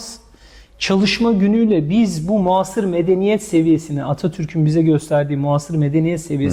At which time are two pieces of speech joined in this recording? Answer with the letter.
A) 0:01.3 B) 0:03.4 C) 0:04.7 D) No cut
D